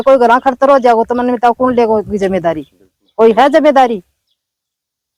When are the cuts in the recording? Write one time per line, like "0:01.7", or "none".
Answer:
none